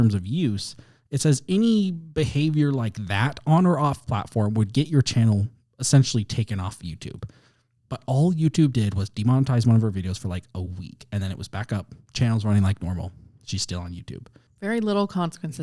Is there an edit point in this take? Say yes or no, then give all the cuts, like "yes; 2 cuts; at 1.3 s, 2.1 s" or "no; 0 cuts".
yes; 1 cut; at 14.4 s